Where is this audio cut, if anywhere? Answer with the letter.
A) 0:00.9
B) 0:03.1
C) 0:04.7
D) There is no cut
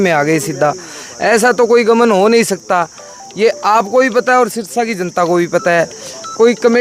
D